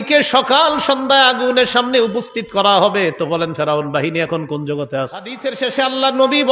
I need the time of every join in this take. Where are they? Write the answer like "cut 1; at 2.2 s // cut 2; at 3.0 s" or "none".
cut 1; at 5.5 s